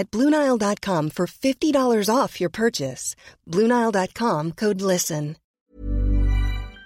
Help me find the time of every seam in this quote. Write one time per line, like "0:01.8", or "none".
0:05.4